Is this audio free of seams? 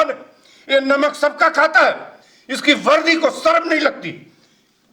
yes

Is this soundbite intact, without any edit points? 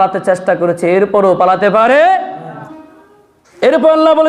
no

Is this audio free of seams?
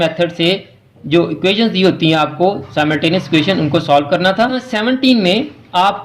no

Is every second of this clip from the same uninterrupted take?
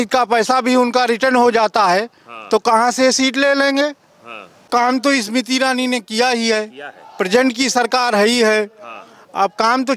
no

